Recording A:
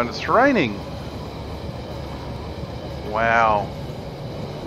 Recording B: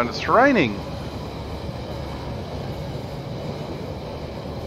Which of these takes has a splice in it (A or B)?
A